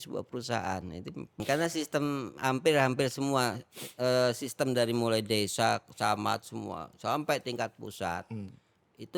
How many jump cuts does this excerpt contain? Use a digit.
1